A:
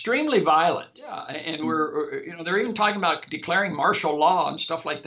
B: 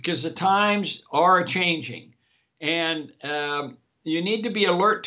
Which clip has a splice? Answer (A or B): A